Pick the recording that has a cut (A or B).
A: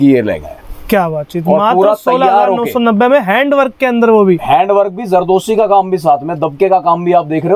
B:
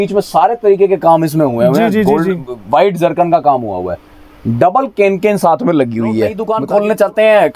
B